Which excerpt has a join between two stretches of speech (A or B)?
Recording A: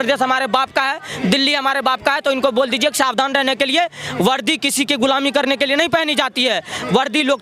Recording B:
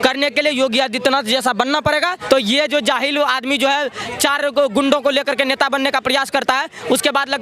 B